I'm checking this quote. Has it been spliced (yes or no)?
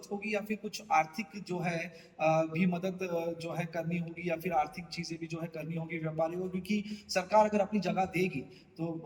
no